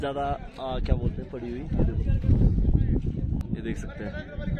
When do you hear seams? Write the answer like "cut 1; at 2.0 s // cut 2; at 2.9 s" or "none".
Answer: cut 1; at 3.4 s